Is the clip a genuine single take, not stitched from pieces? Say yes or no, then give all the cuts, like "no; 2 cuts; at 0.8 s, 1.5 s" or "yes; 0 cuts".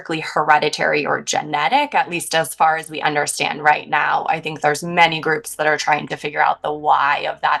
yes; 0 cuts